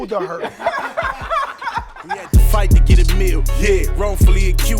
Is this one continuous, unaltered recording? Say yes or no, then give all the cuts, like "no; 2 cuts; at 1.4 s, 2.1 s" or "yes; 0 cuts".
no; 1 cut; at 2.3 s